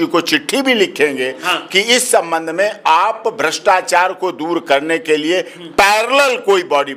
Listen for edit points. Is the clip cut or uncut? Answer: uncut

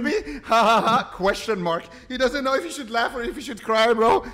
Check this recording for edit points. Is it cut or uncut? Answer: uncut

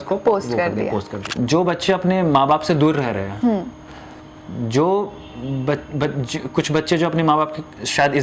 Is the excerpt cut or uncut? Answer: cut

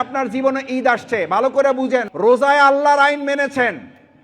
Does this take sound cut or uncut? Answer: cut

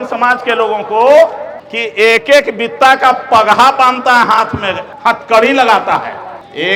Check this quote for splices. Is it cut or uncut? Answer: uncut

